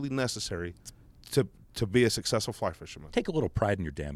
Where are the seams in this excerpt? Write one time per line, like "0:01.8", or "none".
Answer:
0:02.9